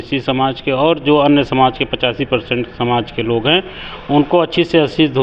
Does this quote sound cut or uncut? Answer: uncut